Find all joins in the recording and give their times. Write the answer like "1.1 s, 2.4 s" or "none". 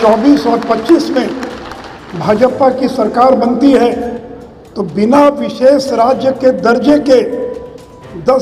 none